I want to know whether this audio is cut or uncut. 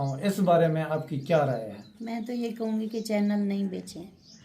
cut